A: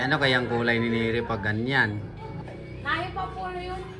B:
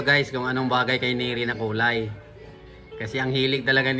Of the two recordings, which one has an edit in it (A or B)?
A